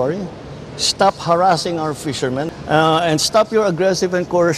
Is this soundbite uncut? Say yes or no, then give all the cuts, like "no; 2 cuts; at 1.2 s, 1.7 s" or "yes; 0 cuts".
no; 1 cut; at 2.5 s